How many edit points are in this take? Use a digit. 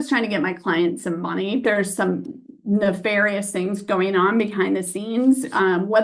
1